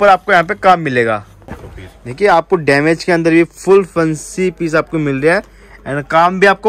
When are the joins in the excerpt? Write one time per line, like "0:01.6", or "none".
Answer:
0:01.4